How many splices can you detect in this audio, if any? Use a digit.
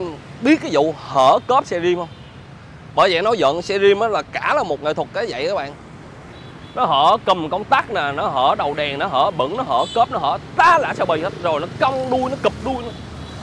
0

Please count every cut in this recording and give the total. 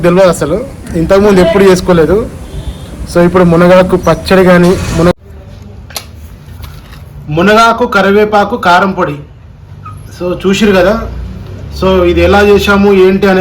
1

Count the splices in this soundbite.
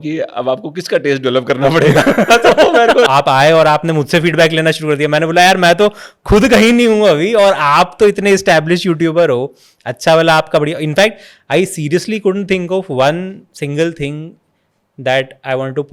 1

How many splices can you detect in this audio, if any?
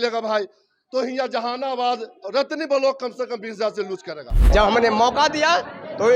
1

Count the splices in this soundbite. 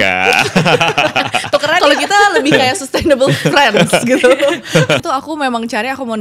1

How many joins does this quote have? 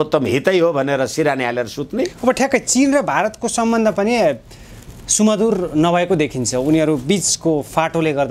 0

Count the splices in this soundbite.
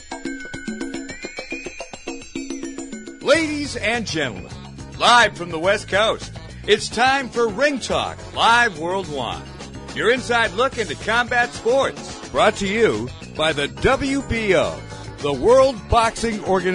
2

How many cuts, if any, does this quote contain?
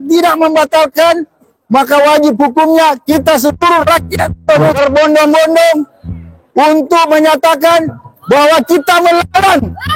1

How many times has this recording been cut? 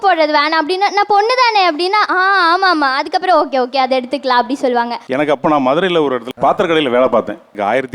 1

